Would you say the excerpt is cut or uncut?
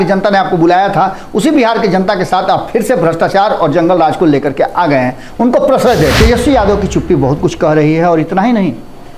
cut